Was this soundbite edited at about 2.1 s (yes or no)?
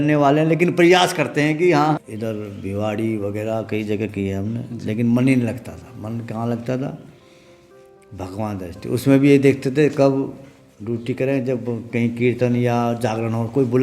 yes